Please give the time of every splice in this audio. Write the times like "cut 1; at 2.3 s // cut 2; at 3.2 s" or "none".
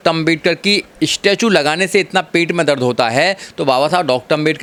none